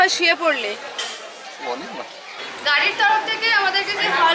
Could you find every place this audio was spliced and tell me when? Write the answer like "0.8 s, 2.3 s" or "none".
2.4 s